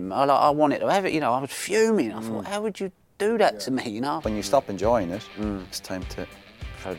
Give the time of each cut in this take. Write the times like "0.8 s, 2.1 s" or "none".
4.2 s, 5.7 s